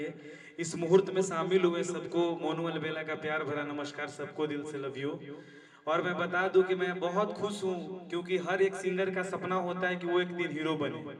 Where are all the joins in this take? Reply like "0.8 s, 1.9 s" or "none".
none